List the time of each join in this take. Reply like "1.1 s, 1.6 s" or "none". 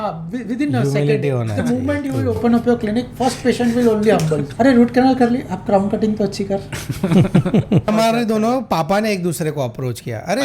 4.5 s, 7.9 s